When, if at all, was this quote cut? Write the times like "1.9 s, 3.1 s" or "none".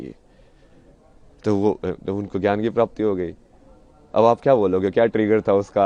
none